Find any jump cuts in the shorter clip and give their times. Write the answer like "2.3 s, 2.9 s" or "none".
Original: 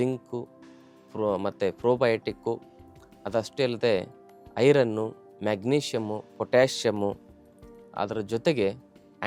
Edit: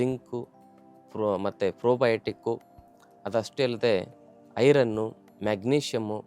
none